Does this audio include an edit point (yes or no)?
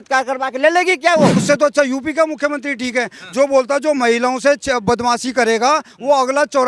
yes